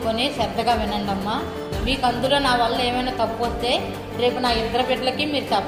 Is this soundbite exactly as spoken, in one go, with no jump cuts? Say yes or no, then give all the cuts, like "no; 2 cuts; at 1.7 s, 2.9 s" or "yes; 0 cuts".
yes; 0 cuts